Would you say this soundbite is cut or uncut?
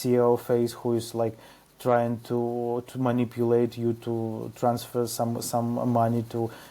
uncut